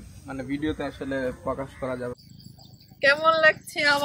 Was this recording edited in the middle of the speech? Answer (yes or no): yes